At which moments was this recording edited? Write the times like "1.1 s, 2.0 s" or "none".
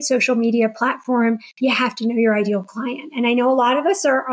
none